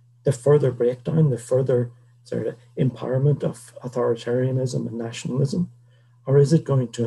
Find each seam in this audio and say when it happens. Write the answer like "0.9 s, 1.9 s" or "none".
none